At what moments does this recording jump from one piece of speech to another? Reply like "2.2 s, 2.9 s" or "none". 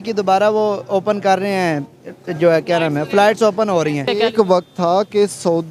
4.0 s